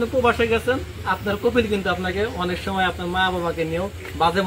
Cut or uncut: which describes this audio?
uncut